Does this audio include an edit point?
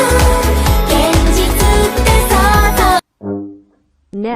yes; 1 cut; at 3.1 s

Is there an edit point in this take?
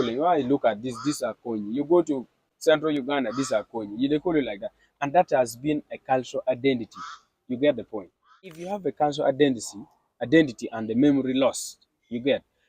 yes; 1 cut; at 8.5 s

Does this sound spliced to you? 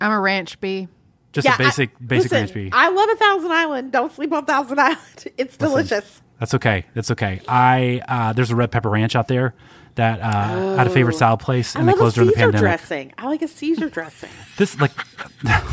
no; 0 cuts

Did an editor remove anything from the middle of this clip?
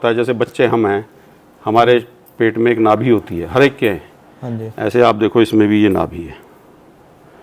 no; 0 cuts

